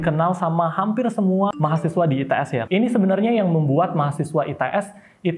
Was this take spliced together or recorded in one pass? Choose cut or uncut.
cut